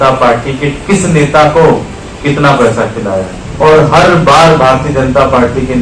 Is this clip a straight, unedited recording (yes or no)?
no